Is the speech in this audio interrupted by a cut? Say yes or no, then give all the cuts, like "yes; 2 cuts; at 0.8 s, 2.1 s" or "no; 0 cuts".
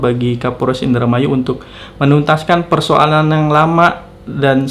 no; 0 cuts